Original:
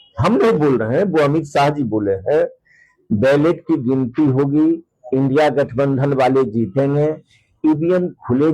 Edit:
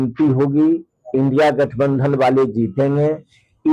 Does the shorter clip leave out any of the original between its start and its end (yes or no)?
no